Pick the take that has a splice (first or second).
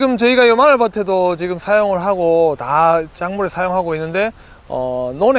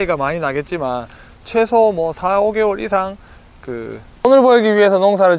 second